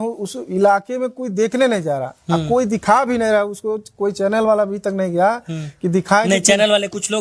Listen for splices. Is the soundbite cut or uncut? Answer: uncut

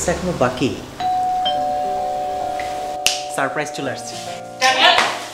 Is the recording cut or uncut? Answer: uncut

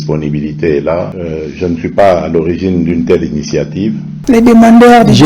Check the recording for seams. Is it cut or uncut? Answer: cut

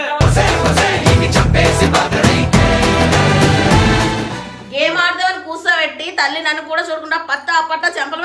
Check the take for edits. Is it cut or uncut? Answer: cut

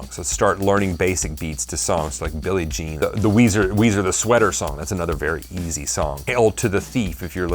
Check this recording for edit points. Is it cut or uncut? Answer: cut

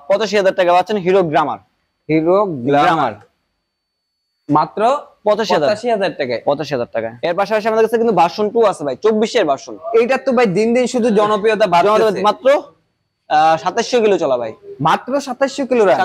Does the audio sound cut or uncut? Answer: uncut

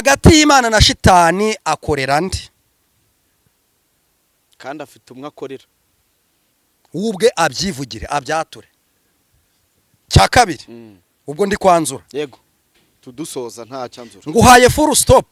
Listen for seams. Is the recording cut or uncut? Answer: uncut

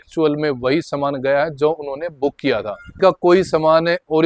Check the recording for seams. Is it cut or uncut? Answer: cut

